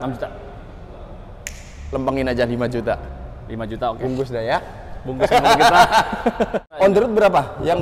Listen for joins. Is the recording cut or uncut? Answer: cut